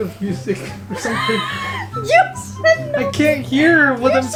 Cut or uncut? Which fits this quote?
uncut